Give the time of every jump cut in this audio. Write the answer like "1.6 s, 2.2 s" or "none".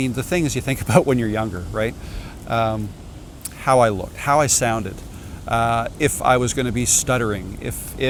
none